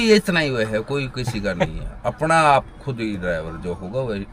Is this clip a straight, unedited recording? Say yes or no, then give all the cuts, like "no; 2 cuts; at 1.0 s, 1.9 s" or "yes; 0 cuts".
yes; 0 cuts